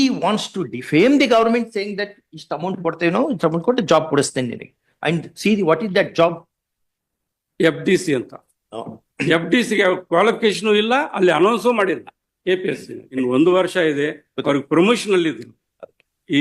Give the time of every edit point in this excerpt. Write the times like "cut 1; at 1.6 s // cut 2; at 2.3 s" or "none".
cut 1; at 13.0 s